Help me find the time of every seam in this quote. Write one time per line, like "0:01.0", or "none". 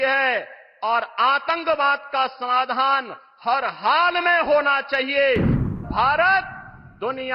0:05.7